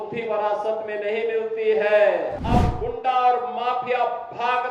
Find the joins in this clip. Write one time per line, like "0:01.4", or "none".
0:02.4

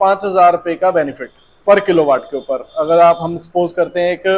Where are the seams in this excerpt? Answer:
none

